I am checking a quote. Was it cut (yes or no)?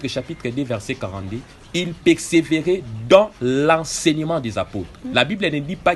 no